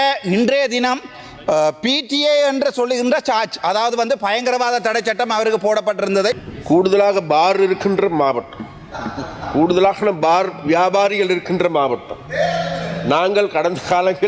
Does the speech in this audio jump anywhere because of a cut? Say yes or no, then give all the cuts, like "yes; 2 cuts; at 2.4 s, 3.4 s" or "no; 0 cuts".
yes; 1 cut; at 6.4 s